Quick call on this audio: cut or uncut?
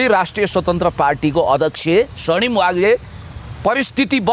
uncut